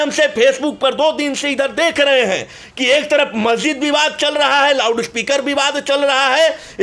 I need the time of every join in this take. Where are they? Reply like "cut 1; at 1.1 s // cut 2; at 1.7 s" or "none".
none